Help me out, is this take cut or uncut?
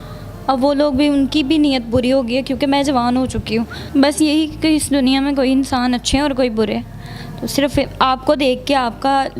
cut